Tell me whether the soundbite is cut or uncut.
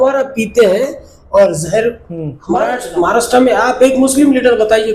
cut